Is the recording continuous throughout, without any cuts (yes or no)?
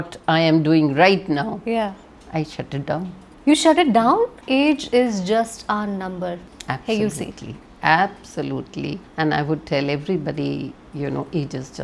no